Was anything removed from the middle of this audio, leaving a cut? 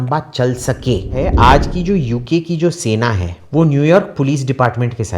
yes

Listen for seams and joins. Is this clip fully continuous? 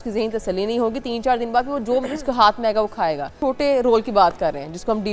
no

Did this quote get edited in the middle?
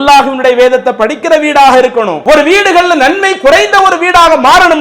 yes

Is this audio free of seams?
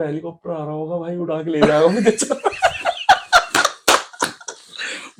yes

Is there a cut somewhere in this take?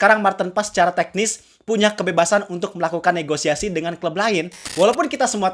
yes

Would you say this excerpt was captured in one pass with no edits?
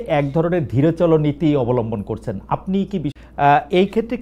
no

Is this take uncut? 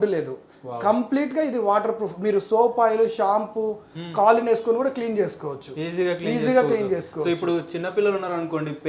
yes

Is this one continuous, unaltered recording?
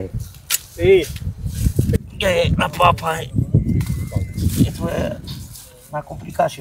no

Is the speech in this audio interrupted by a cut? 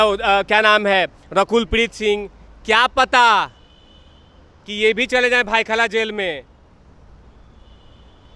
no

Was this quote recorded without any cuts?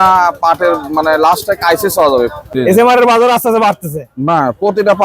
no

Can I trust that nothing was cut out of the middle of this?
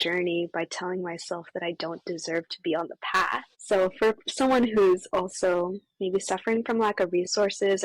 no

